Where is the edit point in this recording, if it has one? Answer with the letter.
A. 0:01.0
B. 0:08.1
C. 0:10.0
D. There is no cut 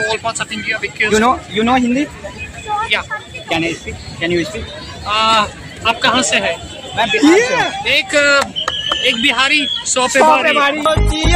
A